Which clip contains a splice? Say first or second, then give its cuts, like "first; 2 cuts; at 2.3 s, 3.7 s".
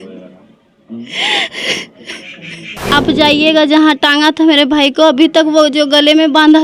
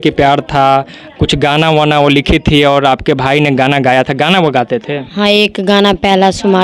first; 1 cut; at 2.8 s